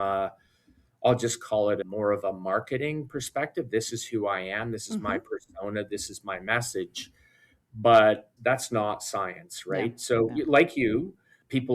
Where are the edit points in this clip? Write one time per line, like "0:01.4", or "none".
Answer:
0:01.8
0:08.3